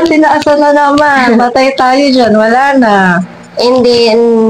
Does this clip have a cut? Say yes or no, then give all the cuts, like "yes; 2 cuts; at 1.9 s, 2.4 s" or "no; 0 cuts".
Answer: no; 0 cuts